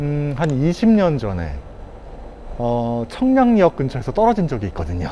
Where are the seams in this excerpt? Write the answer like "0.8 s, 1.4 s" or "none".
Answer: none